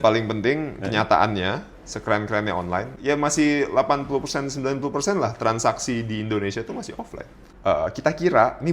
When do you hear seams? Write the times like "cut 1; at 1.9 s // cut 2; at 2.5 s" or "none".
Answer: cut 1; at 2.9 s // cut 2; at 7.5 s